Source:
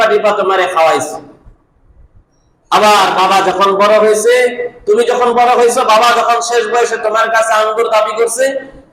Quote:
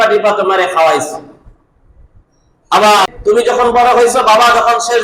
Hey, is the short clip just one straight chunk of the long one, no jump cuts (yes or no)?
no